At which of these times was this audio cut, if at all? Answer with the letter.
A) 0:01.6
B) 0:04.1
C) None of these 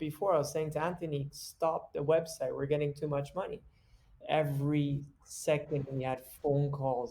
B